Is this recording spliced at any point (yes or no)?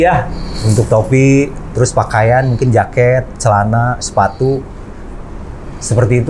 no